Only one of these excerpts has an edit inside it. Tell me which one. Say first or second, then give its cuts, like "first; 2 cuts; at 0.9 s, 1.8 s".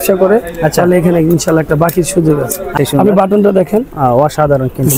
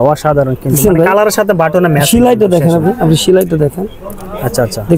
first; 1 cut; at 2.7 s